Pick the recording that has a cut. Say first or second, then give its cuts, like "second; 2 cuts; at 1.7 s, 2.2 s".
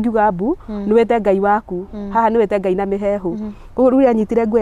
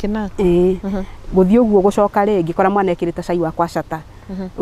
second; 1 cut; at 1.1 s